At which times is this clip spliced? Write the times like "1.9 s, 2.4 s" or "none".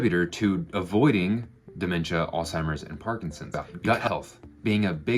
3.5 s